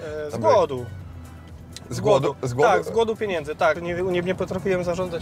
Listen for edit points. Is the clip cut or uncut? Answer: cut